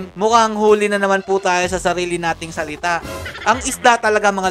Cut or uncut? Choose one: cut